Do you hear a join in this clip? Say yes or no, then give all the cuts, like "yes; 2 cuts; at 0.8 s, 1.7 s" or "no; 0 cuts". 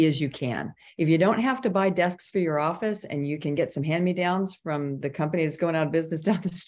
no; 0 cuts